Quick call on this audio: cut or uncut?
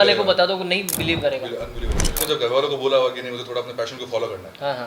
cut